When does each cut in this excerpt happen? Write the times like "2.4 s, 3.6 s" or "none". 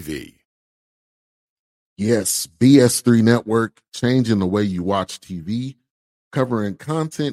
none